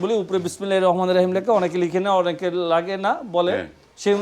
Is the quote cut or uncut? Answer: uncut